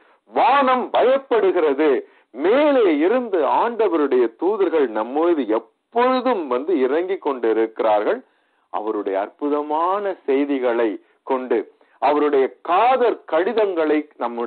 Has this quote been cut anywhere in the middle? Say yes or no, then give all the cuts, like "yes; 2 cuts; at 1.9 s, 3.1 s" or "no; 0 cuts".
no; 0 cuts